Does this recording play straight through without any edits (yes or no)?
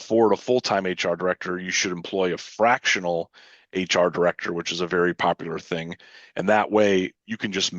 yes